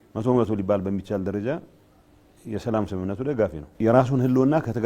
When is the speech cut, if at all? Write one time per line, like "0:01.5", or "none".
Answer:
0:03.6